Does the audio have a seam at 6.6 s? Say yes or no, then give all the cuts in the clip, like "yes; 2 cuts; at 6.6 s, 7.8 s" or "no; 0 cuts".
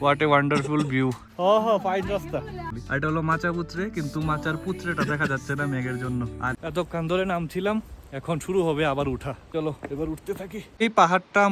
yes; 3 cuts; at 2.7 s, 6.6 s, 10.6 s